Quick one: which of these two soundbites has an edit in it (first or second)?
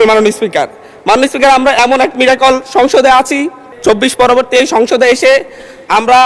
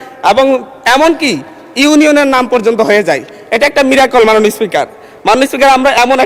first